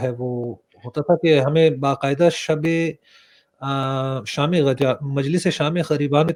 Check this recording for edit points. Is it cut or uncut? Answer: uncut